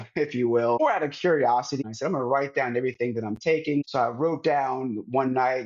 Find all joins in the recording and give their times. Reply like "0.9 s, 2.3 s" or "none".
0.8 s, 1.7 s, 3.9 s